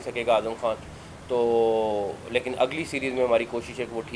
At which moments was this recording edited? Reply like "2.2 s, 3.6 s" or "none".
none